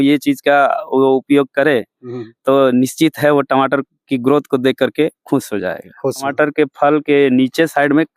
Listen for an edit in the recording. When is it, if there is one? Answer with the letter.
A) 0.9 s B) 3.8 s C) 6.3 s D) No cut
C